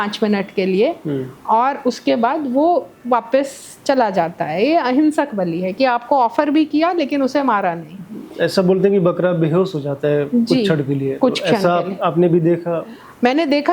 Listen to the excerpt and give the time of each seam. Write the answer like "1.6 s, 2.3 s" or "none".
none

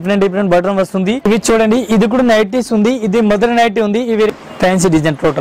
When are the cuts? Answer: 1.2 s, 4.3 s

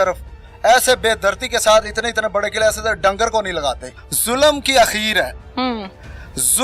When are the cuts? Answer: 3.9 s

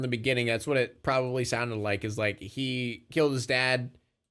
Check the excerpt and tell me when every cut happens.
none

